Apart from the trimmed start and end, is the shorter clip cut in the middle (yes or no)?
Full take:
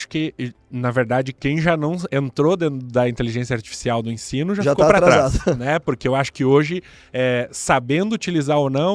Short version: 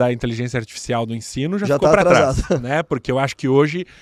no